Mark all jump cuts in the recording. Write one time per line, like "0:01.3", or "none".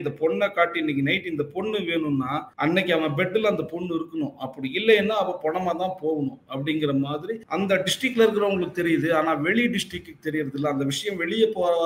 0:02.5
0:07.4